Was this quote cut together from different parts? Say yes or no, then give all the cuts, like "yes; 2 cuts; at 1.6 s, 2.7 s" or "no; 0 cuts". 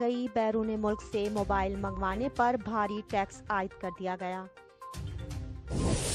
yes; 1 cut; at 5.2 s